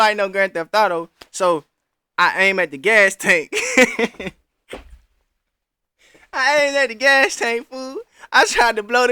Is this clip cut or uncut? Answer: uncut